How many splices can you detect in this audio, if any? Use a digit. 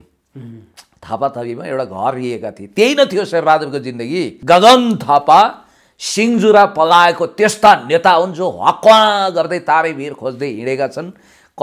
1